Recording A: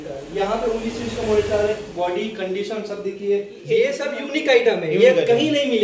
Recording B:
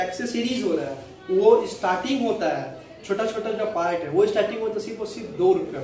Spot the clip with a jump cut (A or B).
A